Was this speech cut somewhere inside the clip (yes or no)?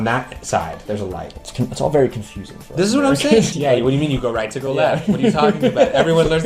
yes